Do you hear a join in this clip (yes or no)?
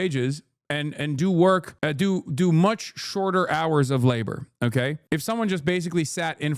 no